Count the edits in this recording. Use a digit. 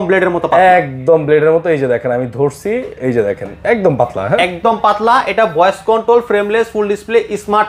0